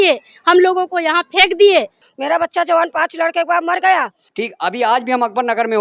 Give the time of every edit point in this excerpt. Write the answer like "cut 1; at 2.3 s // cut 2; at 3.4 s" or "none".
cut 1; at 2.0 s // cut 2; at 4.2 s